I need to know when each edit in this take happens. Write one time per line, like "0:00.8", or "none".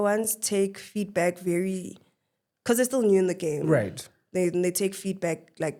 none

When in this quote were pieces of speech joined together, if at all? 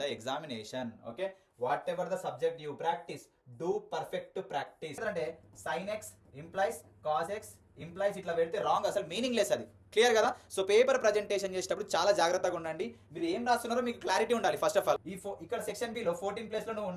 0:05.0
0:15.0

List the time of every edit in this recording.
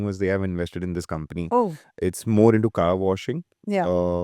0:01.8

